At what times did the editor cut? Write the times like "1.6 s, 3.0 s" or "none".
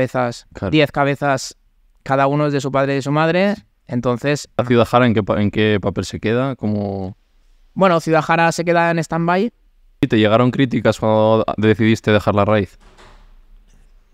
4.6 s, 10.0 s